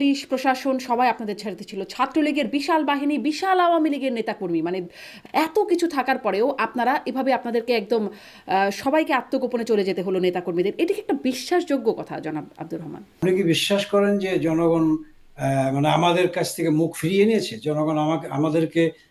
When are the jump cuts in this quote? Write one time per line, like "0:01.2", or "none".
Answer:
0:05.1
0:13.2